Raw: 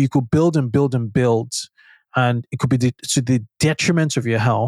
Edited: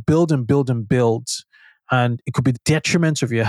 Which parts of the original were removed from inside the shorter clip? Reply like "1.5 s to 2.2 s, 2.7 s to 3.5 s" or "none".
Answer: 2.7 s to 3.4 s